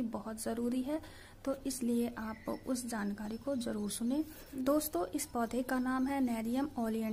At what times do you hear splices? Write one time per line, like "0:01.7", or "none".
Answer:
0:04.4